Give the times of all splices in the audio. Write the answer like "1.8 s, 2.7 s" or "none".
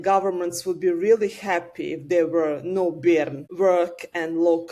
none